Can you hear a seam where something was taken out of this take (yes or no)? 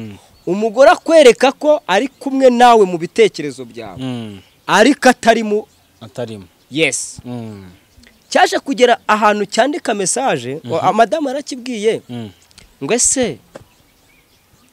no